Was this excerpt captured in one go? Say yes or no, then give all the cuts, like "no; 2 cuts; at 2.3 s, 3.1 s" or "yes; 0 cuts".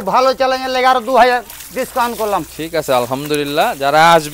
yes; 0 cuts